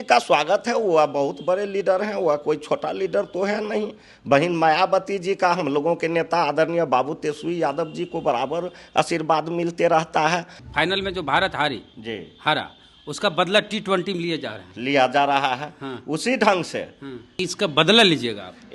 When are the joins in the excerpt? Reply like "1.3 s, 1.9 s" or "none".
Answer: 10.6 s, 17.3 s

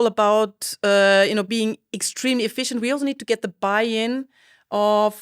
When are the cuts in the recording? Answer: none

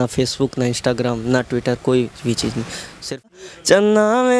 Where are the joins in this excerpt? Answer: 3.5 s

